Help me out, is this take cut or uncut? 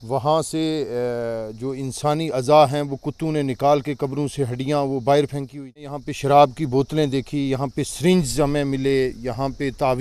cut